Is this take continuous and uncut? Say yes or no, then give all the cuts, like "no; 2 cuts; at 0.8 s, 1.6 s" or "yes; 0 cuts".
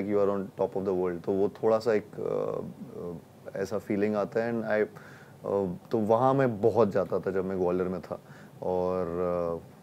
yes; 0 cuts